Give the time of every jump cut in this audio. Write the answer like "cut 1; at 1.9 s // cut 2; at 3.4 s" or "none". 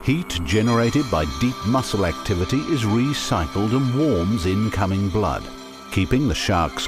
cut 1; at 4.3 s